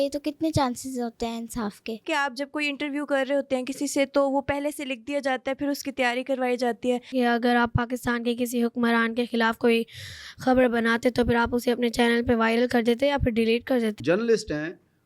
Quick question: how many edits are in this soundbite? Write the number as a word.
three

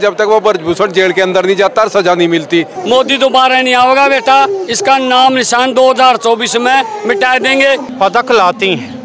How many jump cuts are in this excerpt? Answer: two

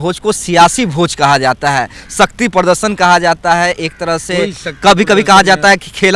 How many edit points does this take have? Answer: zero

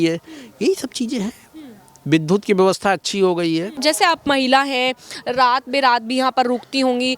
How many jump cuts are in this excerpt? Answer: one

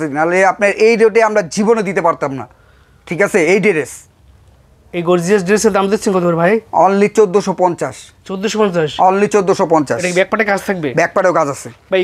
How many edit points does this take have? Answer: zero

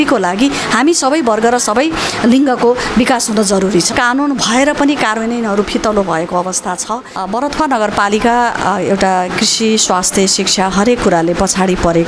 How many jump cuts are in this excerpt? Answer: two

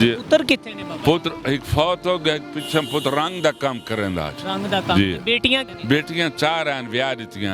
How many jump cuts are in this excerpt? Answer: one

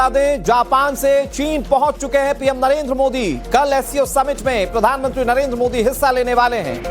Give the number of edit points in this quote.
zero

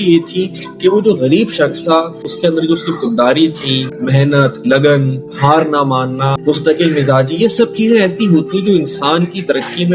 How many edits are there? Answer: three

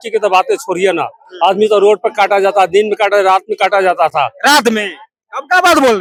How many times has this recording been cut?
zero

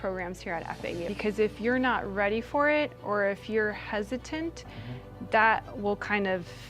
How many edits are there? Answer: one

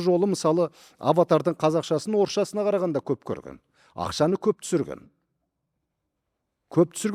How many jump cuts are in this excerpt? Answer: zero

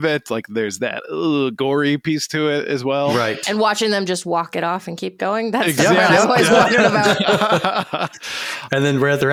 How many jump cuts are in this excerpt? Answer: zero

